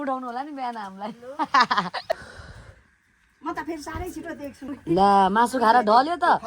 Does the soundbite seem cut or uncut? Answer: cut